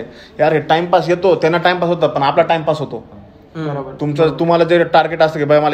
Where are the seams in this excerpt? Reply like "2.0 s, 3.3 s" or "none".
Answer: none

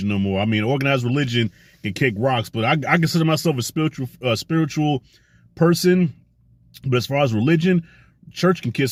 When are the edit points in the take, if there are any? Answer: none

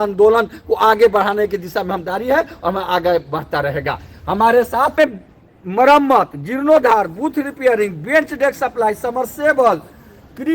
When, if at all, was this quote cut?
5.0 s

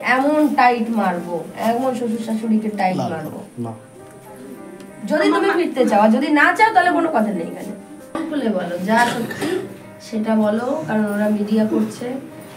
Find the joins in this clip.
8.2 s

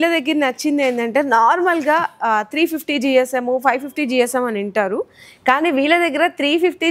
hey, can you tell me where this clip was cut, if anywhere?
none

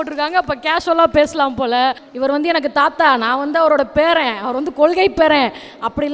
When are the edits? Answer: 2.1 s

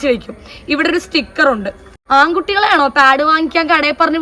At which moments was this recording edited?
1.9 s

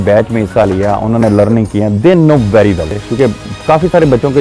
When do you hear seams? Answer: 2.9 s

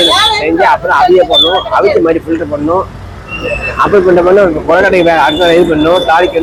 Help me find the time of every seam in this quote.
none

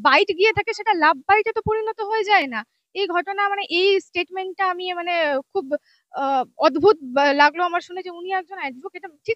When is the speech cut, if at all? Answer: none

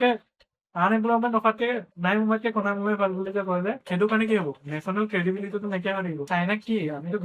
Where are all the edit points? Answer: 3.8 s, 6.3 s

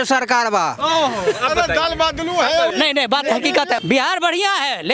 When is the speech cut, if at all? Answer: 3.8 s

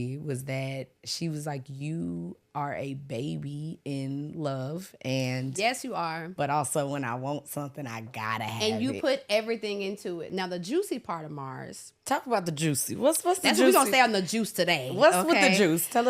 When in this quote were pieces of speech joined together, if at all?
6.3 s, 10.3 s

